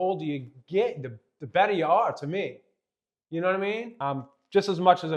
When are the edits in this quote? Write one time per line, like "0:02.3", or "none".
0:03.9